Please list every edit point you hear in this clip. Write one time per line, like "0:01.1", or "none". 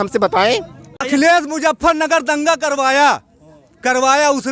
0:00.9